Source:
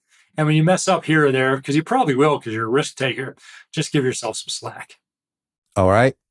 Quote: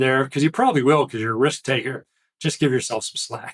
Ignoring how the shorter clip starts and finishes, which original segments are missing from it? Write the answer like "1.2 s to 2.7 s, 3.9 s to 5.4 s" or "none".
none